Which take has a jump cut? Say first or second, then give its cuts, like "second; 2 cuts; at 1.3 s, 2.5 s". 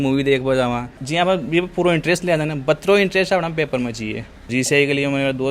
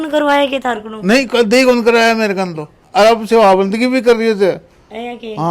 first; 2 cuts; at 0.9 s, 4.5 s